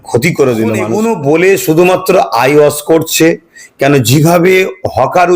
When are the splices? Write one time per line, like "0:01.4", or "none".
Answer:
0:00.9